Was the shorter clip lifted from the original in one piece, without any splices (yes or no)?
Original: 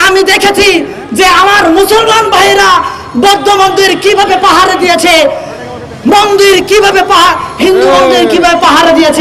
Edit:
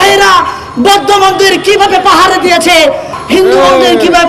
no